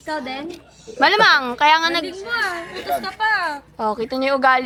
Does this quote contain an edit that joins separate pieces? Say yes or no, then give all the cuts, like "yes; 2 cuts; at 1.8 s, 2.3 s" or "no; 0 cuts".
no; 0 cuts